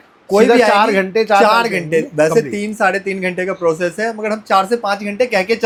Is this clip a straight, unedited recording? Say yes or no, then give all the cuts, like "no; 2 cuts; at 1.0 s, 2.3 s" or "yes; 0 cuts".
yes; 0 cuts